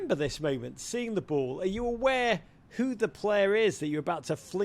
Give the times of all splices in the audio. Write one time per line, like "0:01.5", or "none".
none